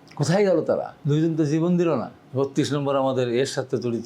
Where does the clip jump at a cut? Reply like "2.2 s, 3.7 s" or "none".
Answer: 0.9 s, 2.2 s